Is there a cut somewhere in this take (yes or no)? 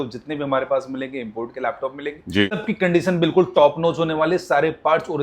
yes